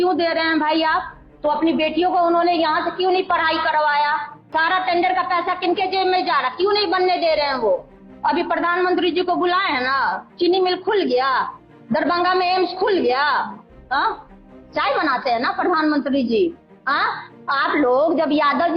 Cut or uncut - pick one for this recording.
cut